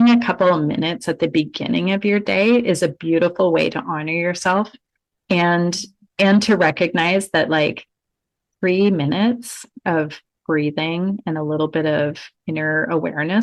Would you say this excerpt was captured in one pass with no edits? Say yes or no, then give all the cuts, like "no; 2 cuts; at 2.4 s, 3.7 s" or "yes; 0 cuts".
yes; 0 cuts